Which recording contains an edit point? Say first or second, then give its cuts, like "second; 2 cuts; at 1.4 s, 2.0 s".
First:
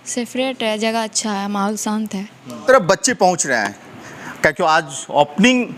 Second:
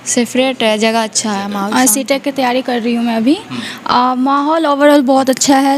second; 1 cut; at 1.6 s